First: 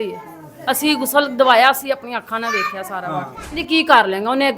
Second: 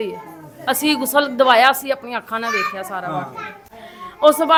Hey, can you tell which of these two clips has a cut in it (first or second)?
first